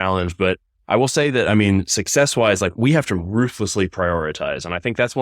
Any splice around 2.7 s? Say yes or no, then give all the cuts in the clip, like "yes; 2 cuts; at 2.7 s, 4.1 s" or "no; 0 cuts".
yes; 1 cut; at 2.7 s